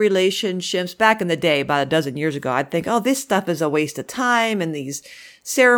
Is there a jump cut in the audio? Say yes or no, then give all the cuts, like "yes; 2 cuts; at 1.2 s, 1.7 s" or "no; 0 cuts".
no; 0 cuts